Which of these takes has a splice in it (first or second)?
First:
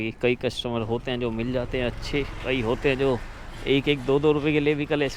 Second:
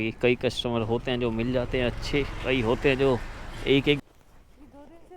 second